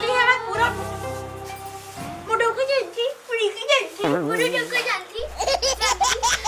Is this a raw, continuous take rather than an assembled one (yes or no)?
yes